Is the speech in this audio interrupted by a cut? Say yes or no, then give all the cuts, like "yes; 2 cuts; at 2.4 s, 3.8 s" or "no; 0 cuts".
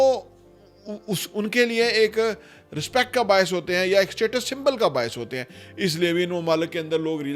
no; 0 cuts